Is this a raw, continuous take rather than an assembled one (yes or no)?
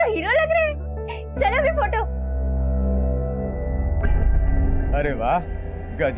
yes